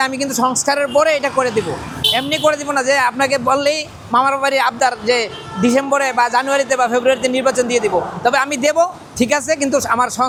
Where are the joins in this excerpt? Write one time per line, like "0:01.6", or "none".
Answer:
none